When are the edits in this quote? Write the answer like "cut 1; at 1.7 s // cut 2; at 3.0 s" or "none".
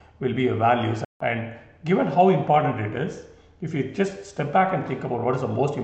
cut 1; at 1.1 s